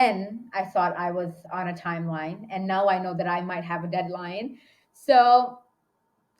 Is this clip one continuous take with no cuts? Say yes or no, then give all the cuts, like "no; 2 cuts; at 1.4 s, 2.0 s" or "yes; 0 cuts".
no; 1 cut; at 1.5 s